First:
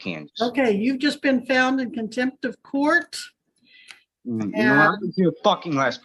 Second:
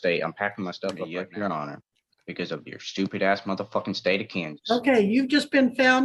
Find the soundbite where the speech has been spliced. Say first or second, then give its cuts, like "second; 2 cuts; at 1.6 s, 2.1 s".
second; 1 cut; at 1.0 s